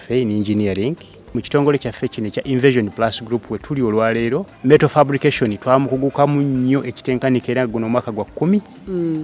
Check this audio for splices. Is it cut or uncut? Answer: cut